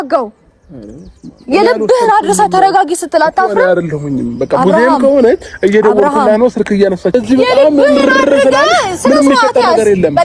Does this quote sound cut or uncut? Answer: cut